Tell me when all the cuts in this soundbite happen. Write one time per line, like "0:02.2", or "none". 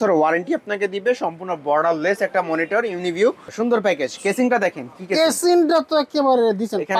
0:03.5

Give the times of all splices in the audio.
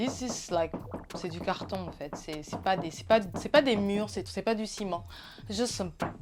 none

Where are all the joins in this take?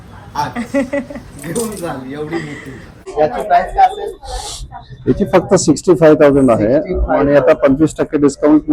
0:03.0

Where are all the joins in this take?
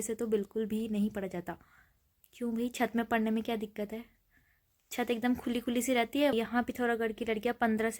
0:06.3

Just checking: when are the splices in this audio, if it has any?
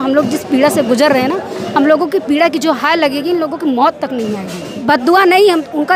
0:04.7

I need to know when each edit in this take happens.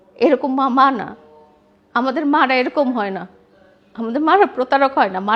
none

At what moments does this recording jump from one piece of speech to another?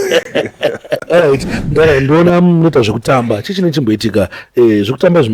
0:01.0

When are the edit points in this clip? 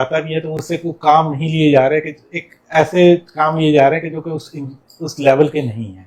none

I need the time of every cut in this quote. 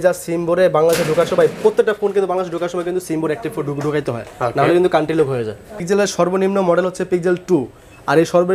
0:05.8

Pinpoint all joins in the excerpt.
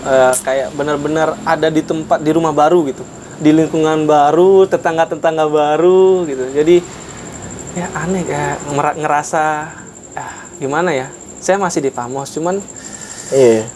none

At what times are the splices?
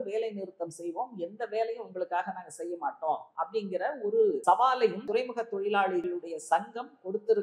0:04.4
0:05.0
0:06.1

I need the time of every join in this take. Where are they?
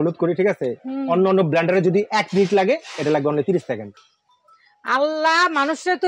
0:04.0

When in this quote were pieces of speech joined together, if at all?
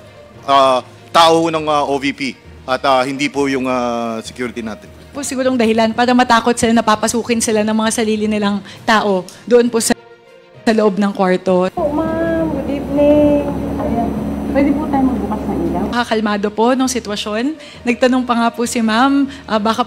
0:11.7
0:15.9

